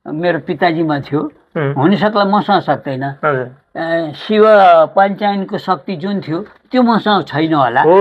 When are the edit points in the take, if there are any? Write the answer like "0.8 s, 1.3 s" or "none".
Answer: none